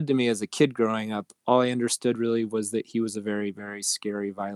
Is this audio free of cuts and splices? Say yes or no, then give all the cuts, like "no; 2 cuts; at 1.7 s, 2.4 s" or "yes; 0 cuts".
yes; 0 cuts